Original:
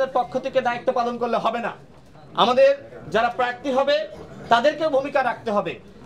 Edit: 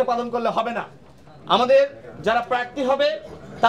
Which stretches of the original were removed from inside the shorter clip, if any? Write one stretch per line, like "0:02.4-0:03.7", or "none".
none